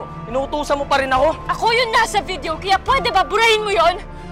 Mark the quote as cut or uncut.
cut